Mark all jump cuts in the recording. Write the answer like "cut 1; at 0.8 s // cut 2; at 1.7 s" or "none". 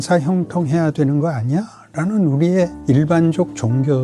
cut 1; at 2.8 s